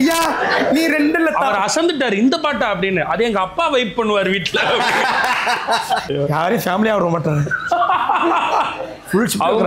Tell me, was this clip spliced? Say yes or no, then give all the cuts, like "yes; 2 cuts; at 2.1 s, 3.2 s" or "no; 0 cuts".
yes; 1 cut; at 6.0 s